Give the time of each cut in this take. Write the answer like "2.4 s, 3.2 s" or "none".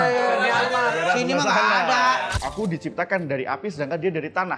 2.3 s